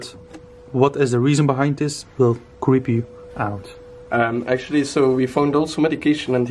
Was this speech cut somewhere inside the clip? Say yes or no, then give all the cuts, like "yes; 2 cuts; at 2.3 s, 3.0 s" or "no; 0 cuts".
no; 0 cuts